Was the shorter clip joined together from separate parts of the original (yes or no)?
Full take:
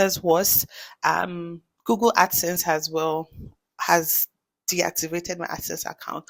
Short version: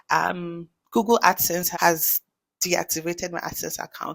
yes